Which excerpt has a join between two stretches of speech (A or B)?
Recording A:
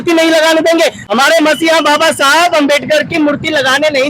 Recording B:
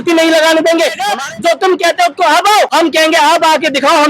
B